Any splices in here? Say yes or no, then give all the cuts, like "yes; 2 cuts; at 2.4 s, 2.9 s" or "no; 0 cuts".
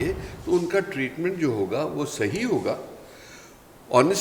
no; 0 cuts